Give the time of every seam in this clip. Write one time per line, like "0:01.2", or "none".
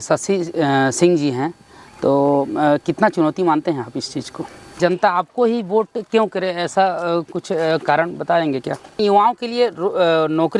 0:04.6
0:09.0